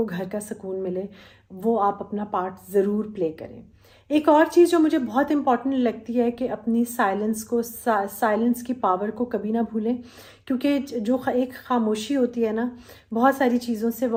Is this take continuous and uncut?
yes; 0 cuts

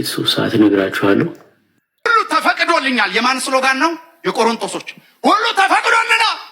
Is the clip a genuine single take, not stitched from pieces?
no; 1 cut; at 2.1 s

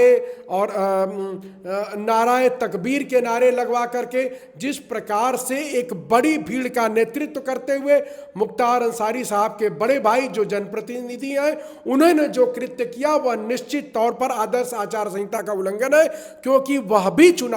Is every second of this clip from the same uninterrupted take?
yes; 0 cuts

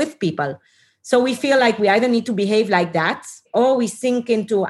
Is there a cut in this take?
no; 0 cuts

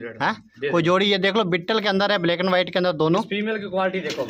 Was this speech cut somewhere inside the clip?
no; 0 cuts

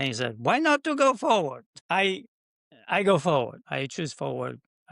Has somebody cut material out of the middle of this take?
yes; 1 cut; at 3.6 s

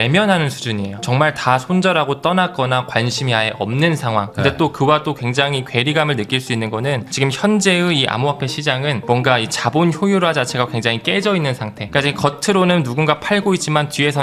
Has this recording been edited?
yes; 3 cuts; at 1.0 s, 4.3 s, 7.1 s

